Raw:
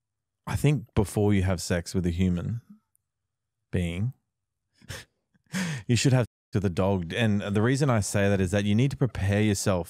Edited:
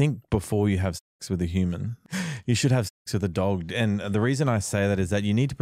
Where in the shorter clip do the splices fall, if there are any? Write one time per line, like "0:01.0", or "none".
0:02.0